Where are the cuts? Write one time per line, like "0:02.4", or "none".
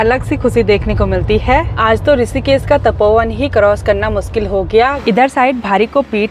0:01.7
0:05.0